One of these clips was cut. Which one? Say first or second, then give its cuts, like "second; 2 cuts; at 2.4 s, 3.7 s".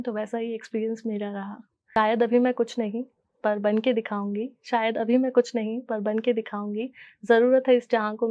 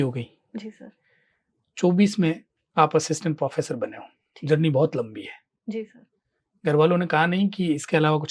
first; 1 cut; at 1.9 s